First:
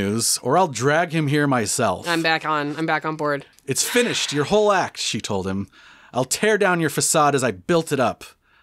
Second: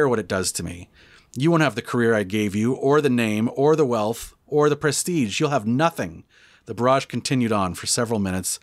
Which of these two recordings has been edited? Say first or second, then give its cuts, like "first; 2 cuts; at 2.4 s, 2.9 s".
first; 1 cut; at 3.5 s